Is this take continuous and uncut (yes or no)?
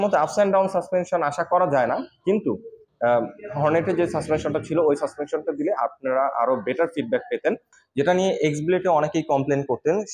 no